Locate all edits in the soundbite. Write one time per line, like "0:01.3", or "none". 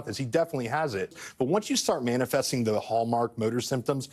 0:01.2